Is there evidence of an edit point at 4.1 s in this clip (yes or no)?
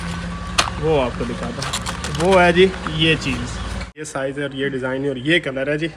yes